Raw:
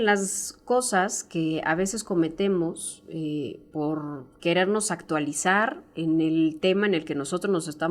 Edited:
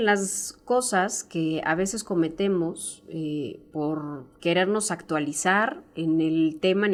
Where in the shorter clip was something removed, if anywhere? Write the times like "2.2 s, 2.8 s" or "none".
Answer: none